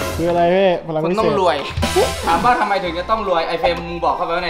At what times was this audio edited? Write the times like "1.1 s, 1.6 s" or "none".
none